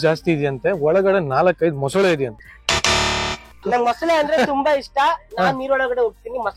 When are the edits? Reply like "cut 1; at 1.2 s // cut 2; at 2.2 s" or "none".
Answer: cut 1; at 3.6 s

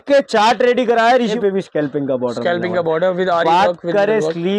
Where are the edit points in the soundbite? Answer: cut 1; at 1.4 s

